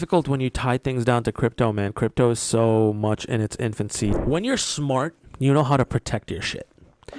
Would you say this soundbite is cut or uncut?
cut